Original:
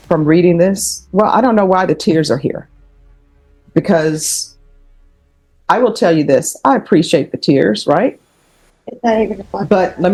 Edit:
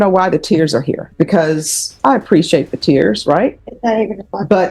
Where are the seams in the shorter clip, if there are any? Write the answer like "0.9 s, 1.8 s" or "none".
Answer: 1.1 s, 1.9 s, 3.7 s